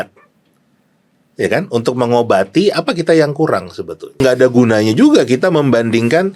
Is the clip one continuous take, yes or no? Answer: no